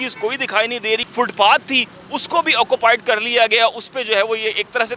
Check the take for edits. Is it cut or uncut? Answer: cut